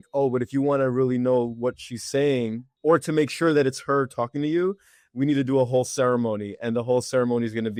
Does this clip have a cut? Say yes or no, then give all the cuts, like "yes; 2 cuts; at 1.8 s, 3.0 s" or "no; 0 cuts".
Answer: no; 0 cuts